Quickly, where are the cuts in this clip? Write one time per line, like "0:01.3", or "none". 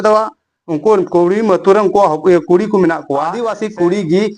0:03.4

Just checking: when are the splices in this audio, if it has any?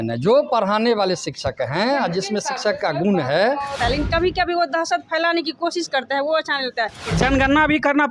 0:03.8
0:07.0

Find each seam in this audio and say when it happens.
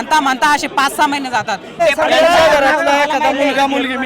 0:01.8

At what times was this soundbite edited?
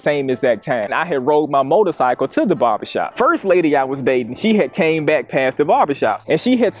0:00.9
0:03.0

